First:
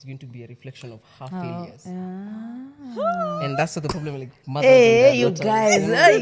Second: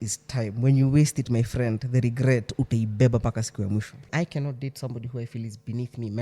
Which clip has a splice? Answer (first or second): second